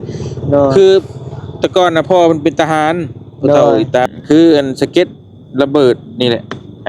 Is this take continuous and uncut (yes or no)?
no